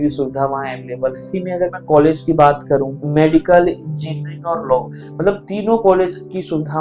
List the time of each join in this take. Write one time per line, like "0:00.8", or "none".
0:01.2
0:03.0